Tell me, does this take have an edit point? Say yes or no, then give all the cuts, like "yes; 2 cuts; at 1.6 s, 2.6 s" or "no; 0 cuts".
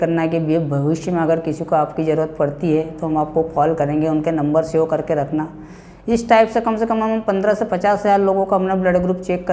no; 0 cuts